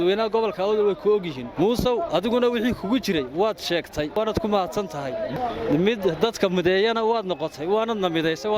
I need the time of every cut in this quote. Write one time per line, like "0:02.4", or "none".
0:01.4
0:04.2
0:05.3